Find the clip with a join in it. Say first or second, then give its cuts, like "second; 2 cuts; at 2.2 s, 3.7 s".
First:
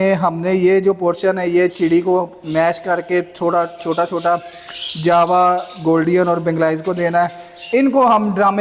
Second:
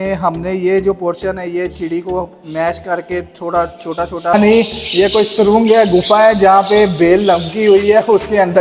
second; 1 cut; at 4.3 s